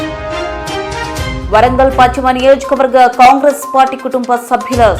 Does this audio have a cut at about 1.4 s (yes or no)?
yes